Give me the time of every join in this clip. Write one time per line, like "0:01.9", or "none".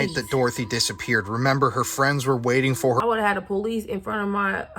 0:03.0